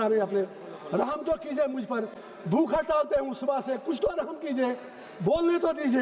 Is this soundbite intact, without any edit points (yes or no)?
yes